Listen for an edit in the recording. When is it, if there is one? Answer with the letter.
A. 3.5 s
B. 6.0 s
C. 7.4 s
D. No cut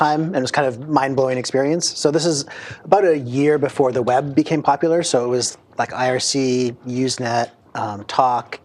C